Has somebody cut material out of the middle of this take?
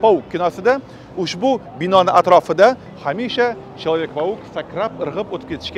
no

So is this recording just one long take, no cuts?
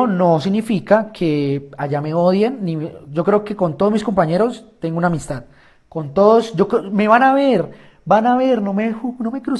yes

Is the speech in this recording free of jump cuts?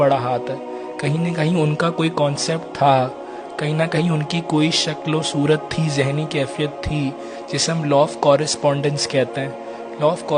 yes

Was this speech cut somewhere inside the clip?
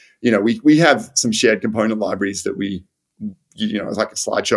no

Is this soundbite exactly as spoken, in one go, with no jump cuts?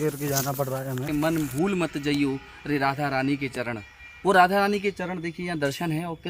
no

